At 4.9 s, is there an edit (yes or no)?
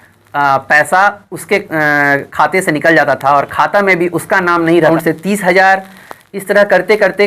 yes